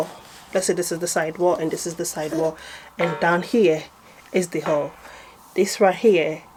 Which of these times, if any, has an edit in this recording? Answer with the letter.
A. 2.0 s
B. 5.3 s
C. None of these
C